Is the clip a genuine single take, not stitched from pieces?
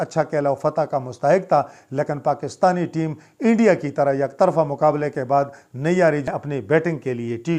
no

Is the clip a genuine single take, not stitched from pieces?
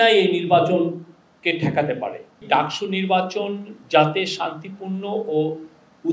no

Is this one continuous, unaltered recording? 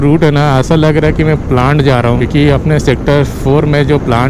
yes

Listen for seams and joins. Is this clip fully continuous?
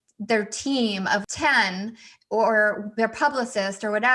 no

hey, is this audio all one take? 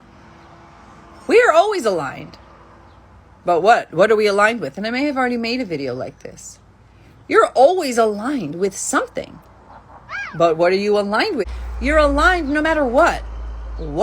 no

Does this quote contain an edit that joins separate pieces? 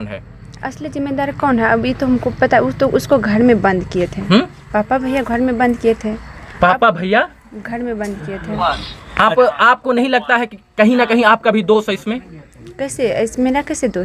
no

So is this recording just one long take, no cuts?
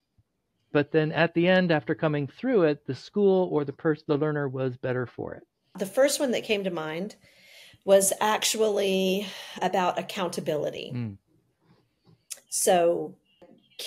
no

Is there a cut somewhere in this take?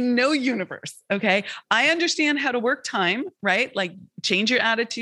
no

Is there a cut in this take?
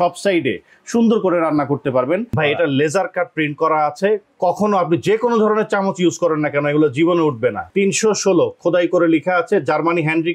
yes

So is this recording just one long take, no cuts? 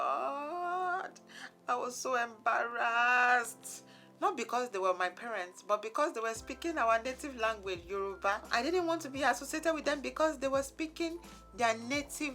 no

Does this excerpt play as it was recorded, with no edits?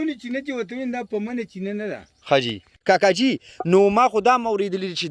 no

